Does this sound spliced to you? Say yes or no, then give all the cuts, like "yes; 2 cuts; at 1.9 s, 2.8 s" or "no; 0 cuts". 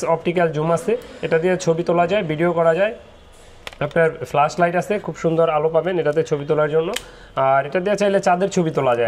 no; 0 cuts